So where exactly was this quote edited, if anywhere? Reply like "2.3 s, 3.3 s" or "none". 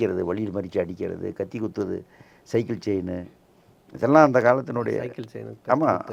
none